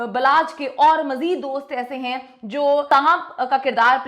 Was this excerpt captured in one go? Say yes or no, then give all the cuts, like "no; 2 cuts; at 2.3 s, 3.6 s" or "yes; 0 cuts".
no; 1 cut; at 2.9 s